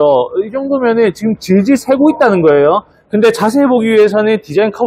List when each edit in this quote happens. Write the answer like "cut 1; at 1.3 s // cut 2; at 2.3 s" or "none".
cut 1; at 3.0 s